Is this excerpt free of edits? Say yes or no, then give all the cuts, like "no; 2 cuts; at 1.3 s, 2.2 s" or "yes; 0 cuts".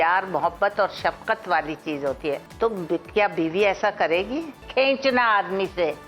no; 2 cuts; at 2.5 s, 4.6 s